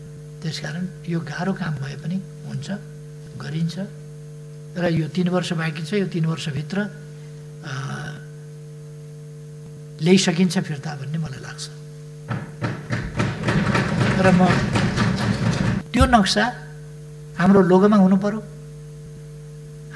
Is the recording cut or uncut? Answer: cut